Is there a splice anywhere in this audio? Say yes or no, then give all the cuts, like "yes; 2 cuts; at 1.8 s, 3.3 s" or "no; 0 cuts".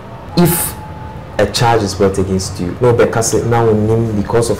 yes; 1 cut; at 2.6 s